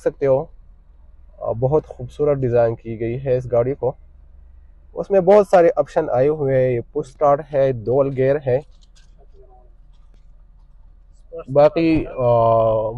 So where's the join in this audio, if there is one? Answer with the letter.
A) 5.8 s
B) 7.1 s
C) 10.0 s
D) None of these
D